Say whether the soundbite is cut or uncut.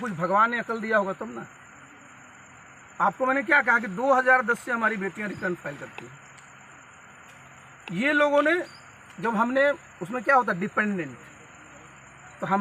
uncut